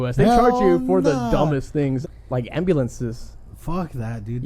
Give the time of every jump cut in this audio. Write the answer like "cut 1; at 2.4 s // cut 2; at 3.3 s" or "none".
cut 1; at 2.0 s